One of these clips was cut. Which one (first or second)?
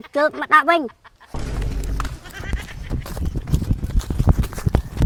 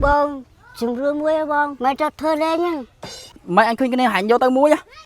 second